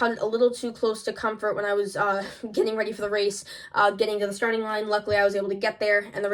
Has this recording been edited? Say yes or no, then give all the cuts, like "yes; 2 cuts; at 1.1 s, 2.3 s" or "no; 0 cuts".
no; 0 cuts